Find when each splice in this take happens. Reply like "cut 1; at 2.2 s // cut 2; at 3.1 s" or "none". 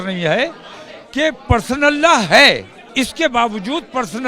cut 1; at 2.8 s